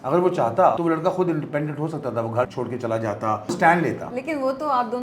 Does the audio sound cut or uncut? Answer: cut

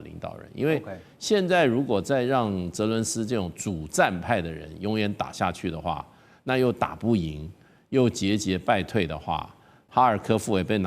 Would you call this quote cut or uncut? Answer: cut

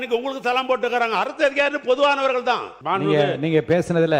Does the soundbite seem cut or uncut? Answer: cut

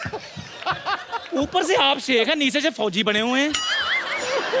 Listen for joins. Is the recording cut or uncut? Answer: uncut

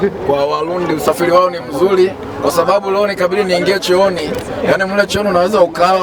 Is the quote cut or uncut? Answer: uncut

